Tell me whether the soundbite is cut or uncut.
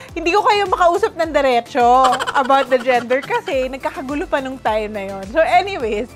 uncut